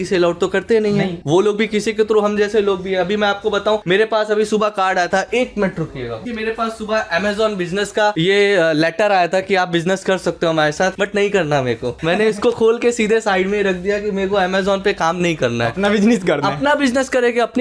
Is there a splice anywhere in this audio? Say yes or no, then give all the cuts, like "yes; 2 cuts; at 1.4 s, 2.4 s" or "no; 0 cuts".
no; 0 cuts